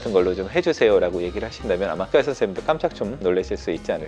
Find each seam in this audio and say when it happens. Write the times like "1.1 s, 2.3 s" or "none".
2.0 s, 3.1 s